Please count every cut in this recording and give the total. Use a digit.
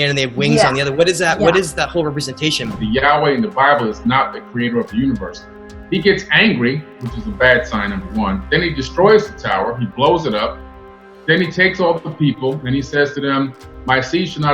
1